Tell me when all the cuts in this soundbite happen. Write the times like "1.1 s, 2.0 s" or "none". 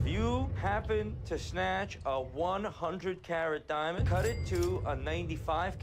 none